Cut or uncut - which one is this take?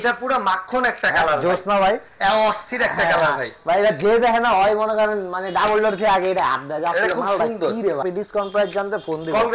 cut